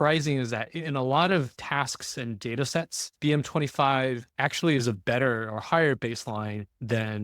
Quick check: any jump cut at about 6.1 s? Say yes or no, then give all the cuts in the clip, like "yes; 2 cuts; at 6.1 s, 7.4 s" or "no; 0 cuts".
no; 3 cuts; at 1.6 s, 3.0 s, 4.3 s